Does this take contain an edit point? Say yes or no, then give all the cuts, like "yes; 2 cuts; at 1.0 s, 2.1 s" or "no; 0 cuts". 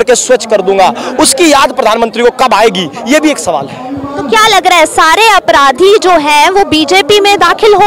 no; 0 cuts